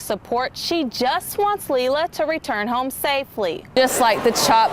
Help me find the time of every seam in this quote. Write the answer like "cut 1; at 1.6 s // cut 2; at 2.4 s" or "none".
cut 1; at 3.7 s